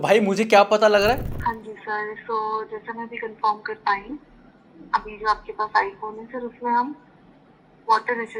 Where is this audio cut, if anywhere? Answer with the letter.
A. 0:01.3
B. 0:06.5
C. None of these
A